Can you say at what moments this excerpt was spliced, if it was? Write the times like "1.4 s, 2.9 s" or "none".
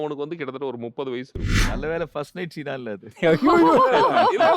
1.6 s